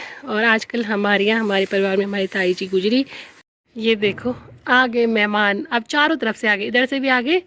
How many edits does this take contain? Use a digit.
1